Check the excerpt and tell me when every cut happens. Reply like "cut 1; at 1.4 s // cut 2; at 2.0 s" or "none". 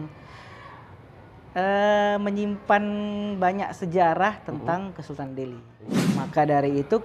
cut 1; at 5.8 s